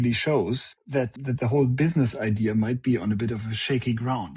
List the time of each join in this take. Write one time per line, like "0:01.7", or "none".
0:01.2